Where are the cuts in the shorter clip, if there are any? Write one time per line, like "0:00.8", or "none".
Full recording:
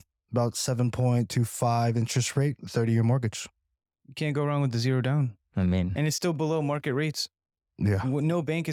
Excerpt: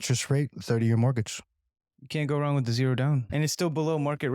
0:03.3